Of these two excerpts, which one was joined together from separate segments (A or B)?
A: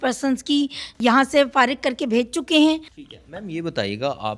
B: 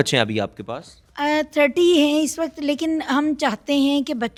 A